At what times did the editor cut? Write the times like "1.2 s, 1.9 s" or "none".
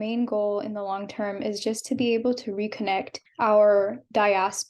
3.2 s